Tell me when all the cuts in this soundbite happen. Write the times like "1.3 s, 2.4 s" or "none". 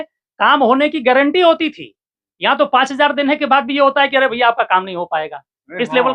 none